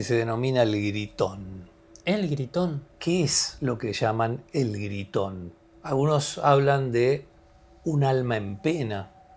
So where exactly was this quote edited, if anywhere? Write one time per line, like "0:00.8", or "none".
0:02.9
0:03.5